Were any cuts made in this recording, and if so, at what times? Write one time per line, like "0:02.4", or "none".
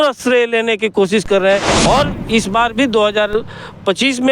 0:01.7